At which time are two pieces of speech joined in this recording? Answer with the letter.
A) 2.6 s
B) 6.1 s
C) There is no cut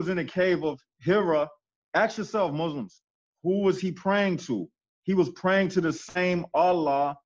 C